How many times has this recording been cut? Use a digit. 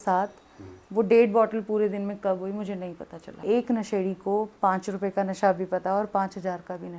1